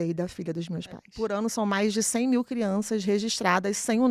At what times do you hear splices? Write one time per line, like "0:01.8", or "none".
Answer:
0:01.1